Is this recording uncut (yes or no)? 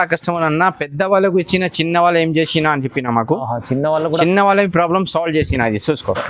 yes